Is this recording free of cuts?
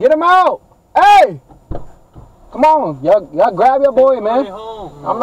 yes; 0 cuts

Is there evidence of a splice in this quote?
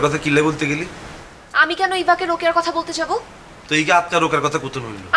no; 0 cuts

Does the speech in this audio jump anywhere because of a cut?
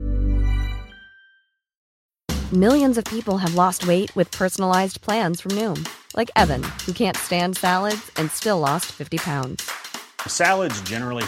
yes; 1 cut; at 1.9 s

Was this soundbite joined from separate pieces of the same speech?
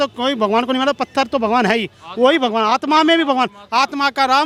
no; 0 cuts

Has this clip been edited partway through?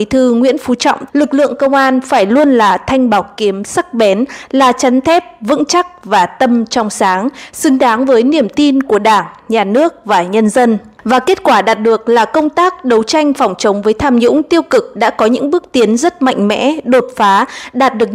yes; 1 cut; at 1.0 s

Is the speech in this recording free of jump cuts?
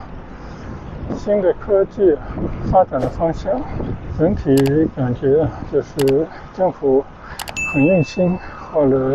no; 1 cut; at 1.1 s

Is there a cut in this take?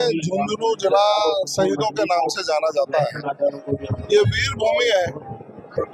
no; 0 cuts

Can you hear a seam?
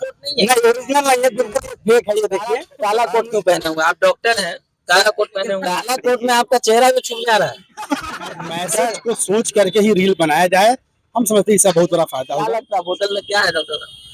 yes; 4 cuts; at 2.7 s, 5.9 s, 8.7 s, 12.6 s

